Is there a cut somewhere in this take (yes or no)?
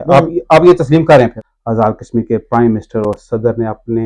yes